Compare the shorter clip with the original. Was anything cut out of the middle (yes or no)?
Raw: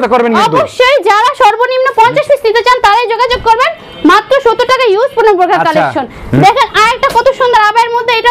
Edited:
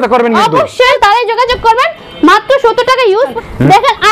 yes